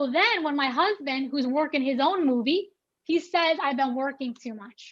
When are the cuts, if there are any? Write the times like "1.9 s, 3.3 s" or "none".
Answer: 2.8 s